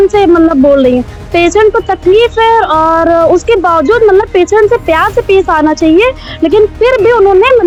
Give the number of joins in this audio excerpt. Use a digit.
0